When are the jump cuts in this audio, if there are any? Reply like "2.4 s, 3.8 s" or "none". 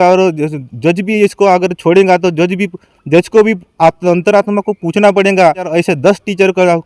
5.7 s